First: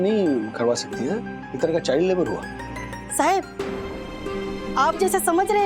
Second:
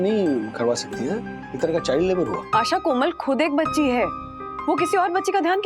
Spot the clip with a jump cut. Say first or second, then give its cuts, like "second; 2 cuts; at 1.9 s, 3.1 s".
second; 1 cut; at 2.4 s